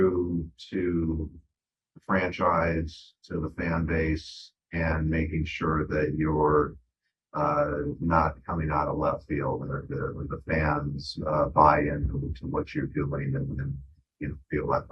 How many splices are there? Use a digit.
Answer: 0